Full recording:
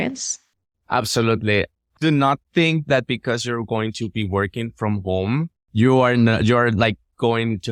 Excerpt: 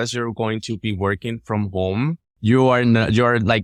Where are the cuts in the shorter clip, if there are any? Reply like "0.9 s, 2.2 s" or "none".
none